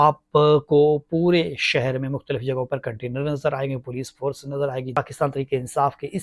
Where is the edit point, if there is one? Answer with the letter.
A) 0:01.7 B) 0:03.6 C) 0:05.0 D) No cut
C